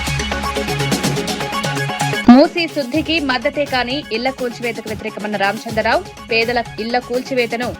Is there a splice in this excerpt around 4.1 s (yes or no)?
no